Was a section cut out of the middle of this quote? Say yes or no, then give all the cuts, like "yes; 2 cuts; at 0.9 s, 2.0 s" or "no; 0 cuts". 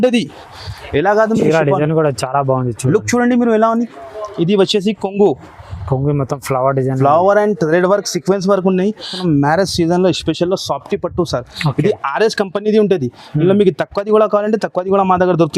yes; 1 cut; at 9.2 s